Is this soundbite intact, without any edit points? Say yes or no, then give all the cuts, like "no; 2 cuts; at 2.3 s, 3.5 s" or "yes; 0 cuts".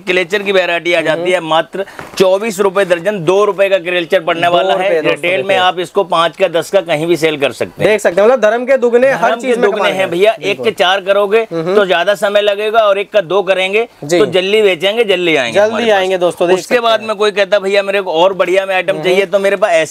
yes; 0 cuts